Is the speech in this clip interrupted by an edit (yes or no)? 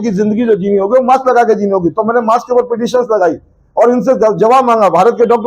no